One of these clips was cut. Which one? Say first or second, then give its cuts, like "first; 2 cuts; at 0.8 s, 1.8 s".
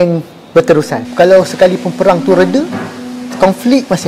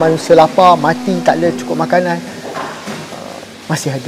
first; 1 cut; at 1.0 s